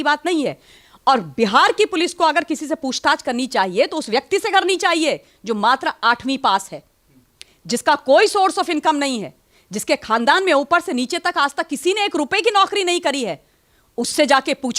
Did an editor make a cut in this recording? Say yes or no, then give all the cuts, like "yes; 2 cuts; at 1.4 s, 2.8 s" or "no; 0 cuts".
no; 0 cuts